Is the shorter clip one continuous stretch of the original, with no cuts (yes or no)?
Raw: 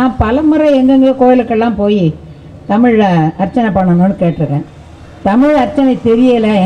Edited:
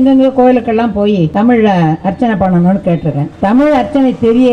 no